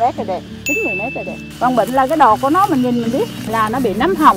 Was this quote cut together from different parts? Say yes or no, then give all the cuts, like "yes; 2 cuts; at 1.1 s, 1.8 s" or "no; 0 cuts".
yes; 2 cuts; at 1.4 s, 3.4 s